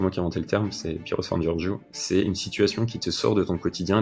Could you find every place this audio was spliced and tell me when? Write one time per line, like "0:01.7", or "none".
none